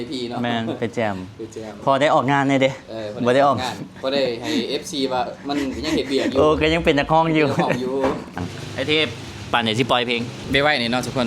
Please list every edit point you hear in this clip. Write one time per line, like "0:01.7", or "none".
0:08.4
0:10.4